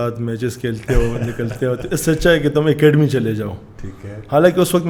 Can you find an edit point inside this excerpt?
no; 0 cuts

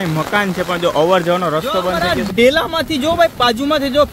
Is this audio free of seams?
no; 1 cut; at 2.1 s

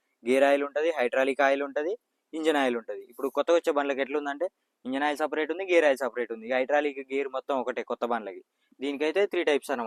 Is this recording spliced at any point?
no; 0 cuts

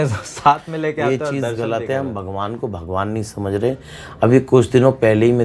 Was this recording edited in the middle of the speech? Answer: no; 0 cuts

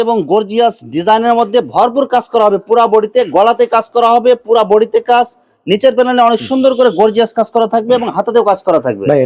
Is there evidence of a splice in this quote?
no; 0 cuts

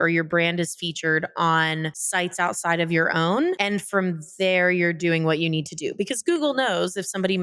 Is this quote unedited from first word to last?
yes; 0 cuts

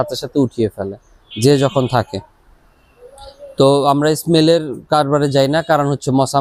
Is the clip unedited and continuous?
yes; 0 cuts

